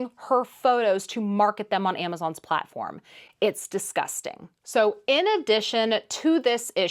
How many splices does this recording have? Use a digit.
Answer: 0